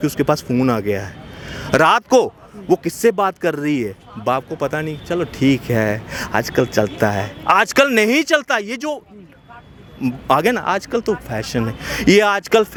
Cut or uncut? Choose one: uncut